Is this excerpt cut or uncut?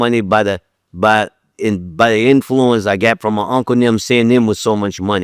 uncut